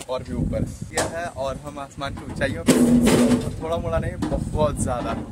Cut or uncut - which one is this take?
cut